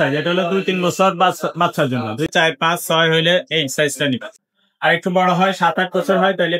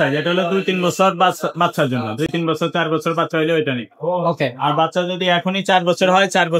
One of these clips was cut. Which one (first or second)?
first